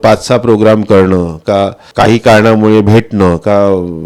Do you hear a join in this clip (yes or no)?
yes